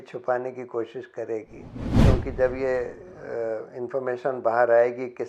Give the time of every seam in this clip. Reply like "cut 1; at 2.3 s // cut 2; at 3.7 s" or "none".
cut 1; at 1.9 s